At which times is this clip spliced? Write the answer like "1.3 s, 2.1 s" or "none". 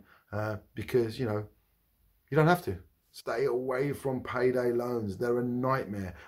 3.1 s